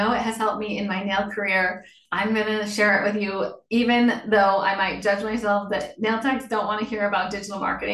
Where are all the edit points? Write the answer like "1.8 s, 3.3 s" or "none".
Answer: none